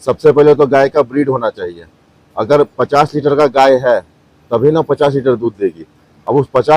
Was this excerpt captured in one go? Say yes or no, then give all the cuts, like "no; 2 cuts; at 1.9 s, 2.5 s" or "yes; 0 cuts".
yes; 0 cuts